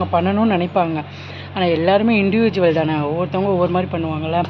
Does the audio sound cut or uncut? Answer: uncut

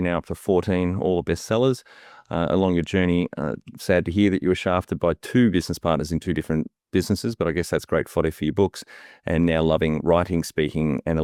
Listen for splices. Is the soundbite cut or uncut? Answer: uncut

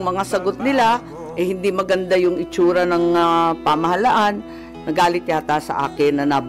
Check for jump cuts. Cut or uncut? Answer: uncut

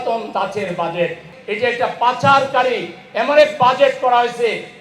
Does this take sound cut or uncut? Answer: cut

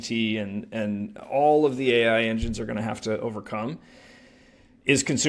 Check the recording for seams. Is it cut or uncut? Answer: uncut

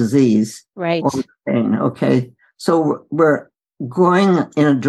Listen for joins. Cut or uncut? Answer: uncut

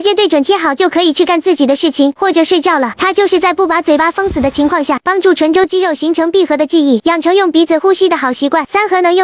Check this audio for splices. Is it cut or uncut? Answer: uncut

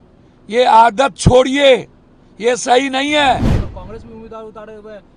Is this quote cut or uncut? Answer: cut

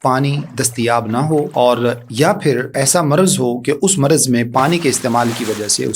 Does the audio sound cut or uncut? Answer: cut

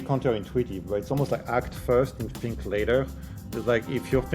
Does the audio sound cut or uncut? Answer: uncut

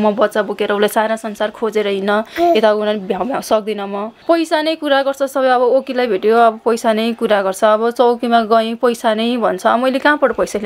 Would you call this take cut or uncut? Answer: cut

